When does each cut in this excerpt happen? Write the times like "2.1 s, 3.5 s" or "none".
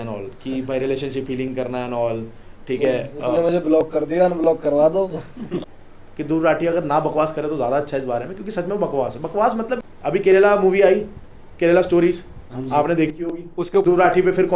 5.6 s, 9.8 s, 13.8 s